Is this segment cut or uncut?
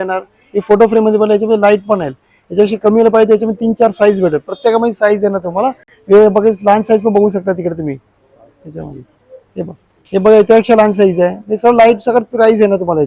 uncut